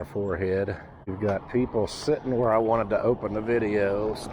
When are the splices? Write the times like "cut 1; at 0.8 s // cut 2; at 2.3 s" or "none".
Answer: cut 1; at 1.1 s